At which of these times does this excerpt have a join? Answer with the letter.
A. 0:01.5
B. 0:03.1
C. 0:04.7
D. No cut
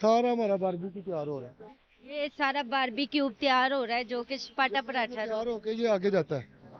D